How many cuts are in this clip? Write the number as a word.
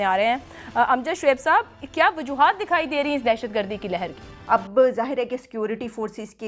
one